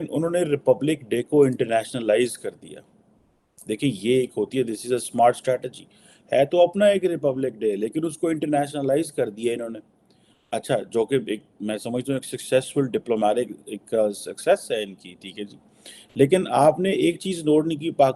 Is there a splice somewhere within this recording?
no; 0 cuts

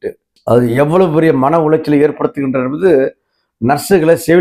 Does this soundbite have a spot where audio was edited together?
no; 0 cuts

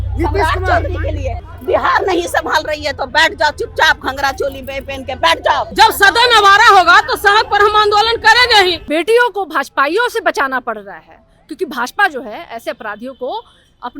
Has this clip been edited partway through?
yes; 3 cuts; at 1.4 s, 5.7 s, 8.8 s

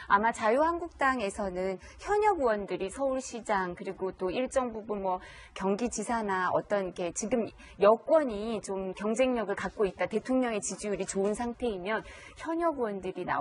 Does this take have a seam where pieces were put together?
yes; 1 cut; at 7.9 s

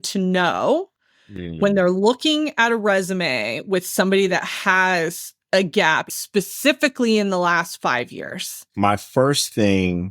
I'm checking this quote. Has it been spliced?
yes; 2 cuts; at 6.1 s, 8.6 s

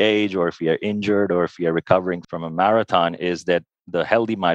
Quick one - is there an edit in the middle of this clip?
yes; 1 cut; at 2.3 s

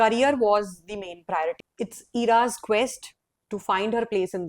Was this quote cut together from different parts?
yes; 1 cut; at 1.6 s

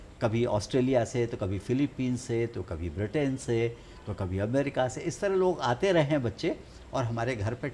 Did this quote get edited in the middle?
no; 0 cuts

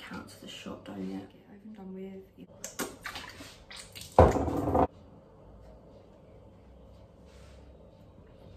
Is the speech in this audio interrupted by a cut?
yes; 2 cuts; at 2.5 s, 4.8 s

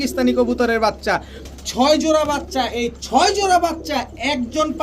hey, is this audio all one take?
no; 1 cut; at 1.4 s

